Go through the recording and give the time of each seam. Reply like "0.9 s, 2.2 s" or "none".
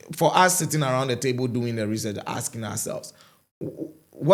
none